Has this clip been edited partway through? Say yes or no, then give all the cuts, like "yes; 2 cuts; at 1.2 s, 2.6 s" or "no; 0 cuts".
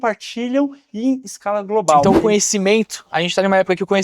yes; 1 cut; at 2.0 s